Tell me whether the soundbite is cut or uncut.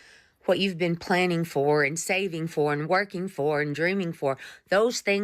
uncut